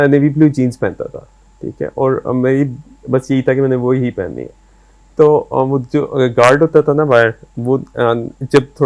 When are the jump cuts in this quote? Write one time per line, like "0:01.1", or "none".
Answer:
none

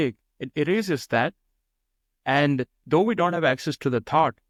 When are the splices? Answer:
none

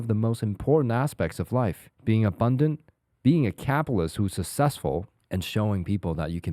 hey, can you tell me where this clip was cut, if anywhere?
0:01.9
0:05.2

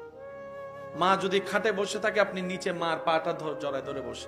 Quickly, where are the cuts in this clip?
none

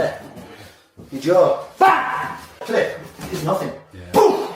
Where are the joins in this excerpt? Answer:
0:02.6

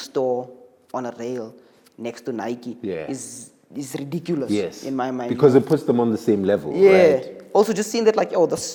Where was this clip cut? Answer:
none

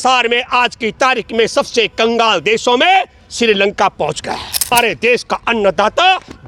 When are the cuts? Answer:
0:04.7

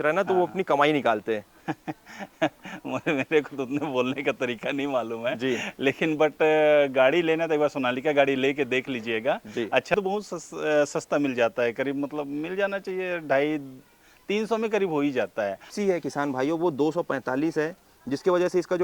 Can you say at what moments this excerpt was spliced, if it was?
0:01.5
0:09.5
0:15.7

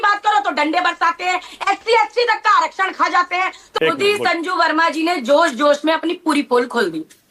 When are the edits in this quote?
0:03.6

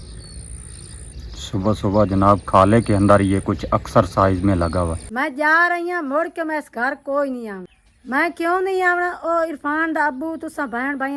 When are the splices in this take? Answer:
0:05.0

